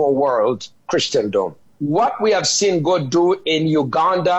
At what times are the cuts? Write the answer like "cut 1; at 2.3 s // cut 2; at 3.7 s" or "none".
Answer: cut 1; at 1.7 s